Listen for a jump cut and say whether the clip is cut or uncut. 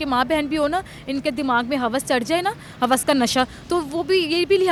uncut